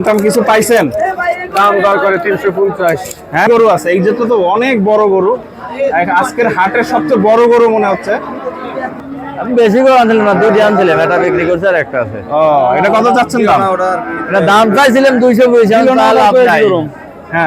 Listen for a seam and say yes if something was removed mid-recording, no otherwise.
yes